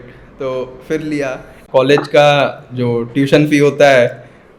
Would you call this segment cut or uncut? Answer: cut